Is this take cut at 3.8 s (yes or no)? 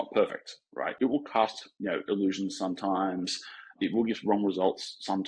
yes